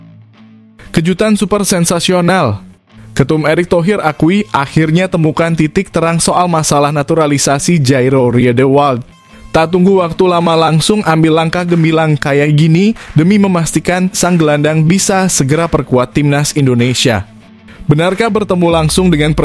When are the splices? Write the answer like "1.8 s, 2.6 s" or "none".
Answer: 0.9 s